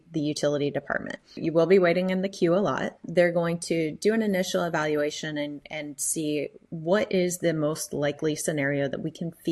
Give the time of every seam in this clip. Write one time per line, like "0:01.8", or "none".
0:01.4
0:06.6